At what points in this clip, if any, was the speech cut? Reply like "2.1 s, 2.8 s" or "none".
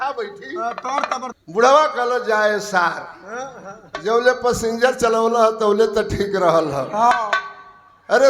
1.3 s